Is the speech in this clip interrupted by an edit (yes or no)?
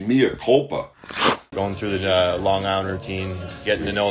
yes